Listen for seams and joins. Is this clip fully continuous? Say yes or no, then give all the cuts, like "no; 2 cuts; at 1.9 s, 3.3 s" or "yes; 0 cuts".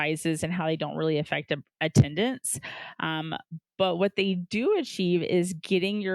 yes; 0 cuts